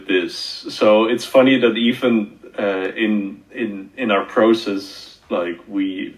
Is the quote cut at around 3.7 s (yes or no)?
no